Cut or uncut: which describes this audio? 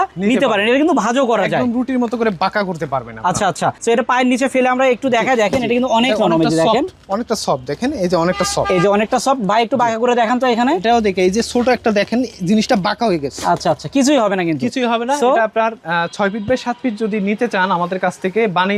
uncut